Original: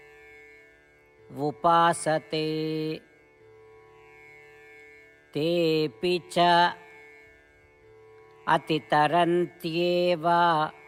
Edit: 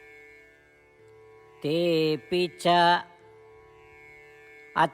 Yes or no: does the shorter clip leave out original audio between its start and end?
yes